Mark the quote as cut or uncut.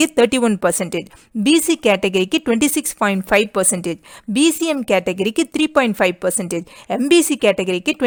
uncut